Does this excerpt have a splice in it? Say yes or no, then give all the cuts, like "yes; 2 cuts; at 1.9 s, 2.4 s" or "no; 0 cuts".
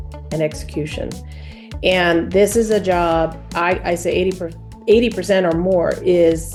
no; 0 cuts